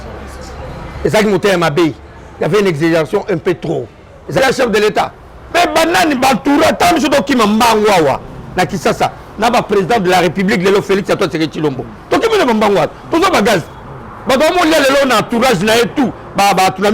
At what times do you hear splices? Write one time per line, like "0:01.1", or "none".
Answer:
0:04.4